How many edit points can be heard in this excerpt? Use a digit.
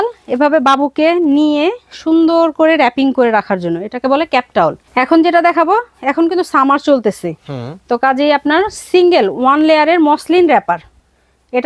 1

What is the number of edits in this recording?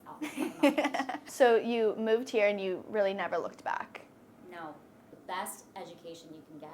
2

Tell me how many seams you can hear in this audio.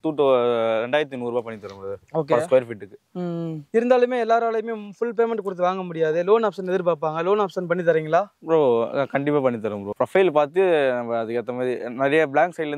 1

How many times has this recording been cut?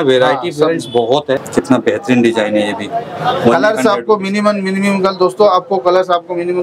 1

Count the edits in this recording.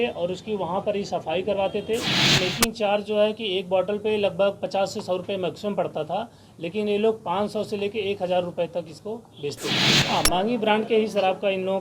2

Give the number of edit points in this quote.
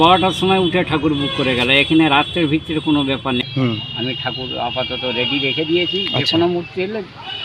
1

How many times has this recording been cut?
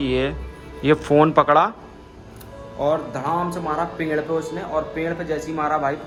0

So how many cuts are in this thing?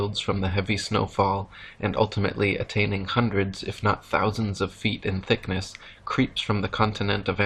1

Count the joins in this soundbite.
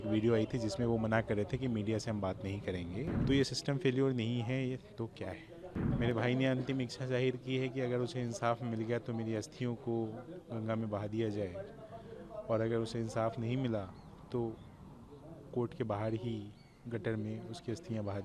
2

